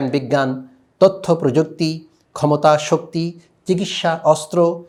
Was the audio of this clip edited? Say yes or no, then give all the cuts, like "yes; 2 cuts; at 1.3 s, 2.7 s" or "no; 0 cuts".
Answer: no; 0 cuts